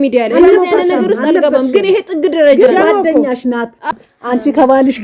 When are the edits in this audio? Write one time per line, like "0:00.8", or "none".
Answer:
0:03.9